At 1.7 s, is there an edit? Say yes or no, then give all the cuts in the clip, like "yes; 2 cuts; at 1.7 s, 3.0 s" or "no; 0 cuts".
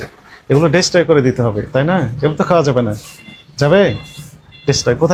no; 0 cuts